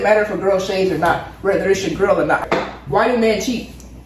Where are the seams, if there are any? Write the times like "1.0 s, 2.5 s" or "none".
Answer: 2.4 s

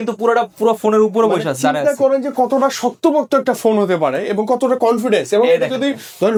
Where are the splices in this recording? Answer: none

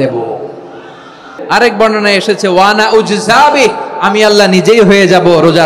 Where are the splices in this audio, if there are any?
1.4 s

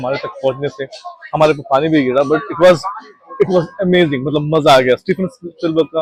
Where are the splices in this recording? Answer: none

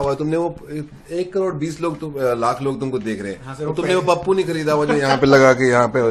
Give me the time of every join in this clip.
none

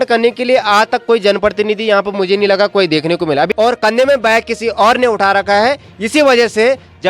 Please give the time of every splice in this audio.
3.5 s

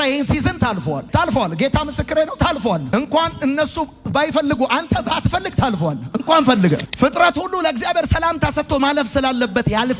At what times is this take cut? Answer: none

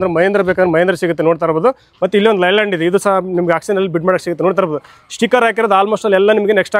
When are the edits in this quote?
none

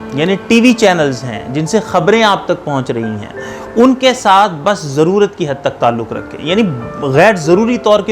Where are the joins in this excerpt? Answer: none

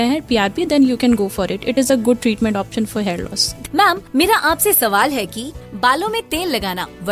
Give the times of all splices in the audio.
3.6 s, 5.2 s

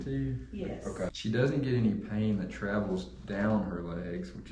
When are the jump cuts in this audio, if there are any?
1.1 s

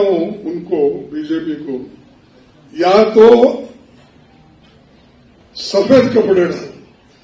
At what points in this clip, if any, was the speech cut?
none

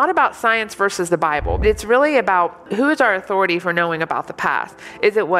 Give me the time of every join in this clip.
1.6 s, 2.7 s

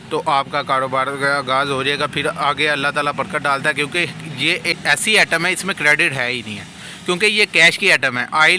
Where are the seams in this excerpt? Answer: 4.7 s

